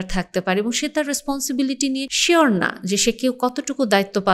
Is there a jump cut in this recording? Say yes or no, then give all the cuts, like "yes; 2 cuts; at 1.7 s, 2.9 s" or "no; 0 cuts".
yes; 1 cut; at 2.1 s